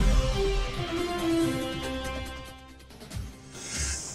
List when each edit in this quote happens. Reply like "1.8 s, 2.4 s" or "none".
none